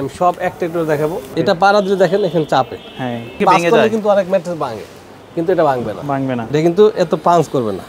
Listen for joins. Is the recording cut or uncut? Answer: cut